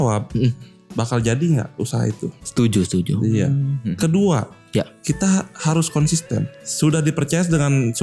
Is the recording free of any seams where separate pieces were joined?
no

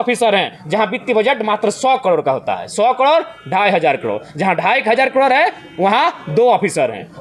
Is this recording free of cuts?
yes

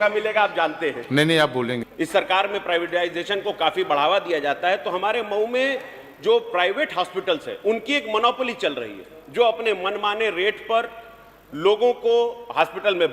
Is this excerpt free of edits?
no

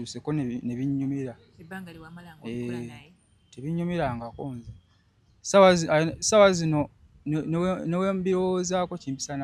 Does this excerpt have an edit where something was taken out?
no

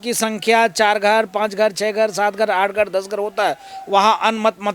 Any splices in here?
no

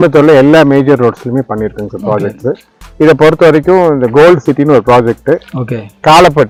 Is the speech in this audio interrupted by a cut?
no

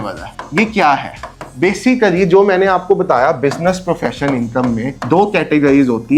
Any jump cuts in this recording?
no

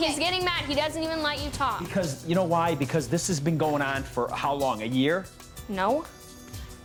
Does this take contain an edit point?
no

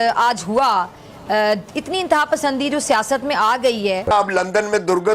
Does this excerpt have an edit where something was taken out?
no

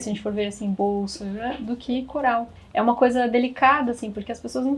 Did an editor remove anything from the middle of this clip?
no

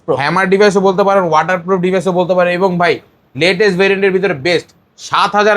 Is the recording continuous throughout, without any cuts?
yes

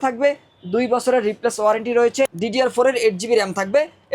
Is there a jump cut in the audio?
yes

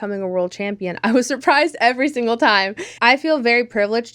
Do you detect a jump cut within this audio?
yes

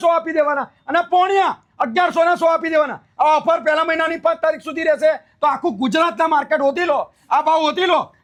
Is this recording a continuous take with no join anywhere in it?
yes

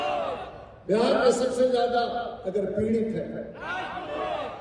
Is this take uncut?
yes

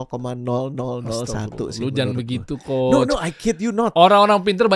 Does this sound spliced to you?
no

